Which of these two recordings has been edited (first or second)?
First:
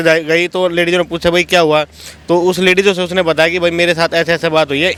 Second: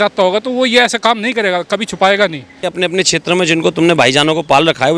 second